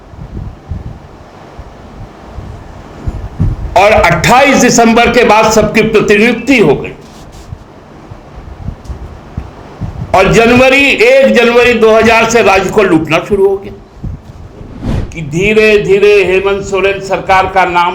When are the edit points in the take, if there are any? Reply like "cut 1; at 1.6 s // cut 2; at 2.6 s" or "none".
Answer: cut 1; at 15.0 s